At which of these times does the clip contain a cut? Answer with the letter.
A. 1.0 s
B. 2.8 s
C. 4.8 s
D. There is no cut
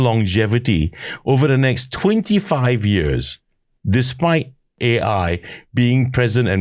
C